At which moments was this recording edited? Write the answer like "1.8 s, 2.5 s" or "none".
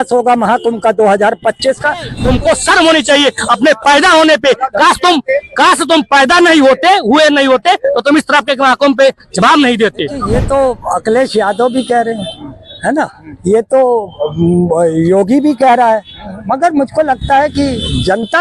2.1 s, 10.3 s